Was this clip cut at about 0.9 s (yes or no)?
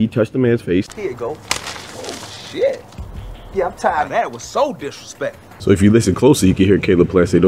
yes